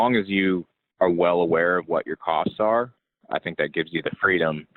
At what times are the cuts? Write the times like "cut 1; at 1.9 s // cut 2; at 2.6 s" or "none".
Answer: none